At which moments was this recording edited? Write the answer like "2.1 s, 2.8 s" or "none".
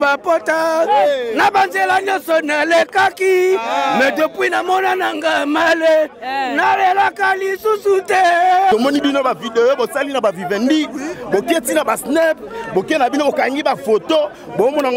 8.7 s